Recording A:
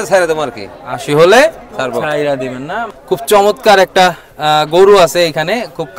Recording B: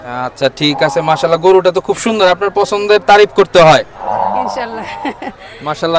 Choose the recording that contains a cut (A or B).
A